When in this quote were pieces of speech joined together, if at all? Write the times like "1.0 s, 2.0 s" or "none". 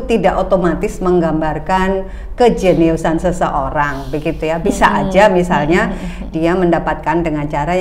none